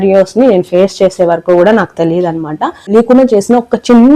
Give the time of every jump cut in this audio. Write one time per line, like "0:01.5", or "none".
0:02.9